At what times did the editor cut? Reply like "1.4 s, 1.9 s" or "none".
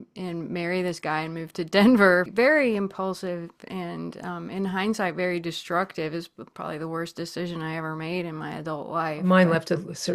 2.3 s, 9.2 s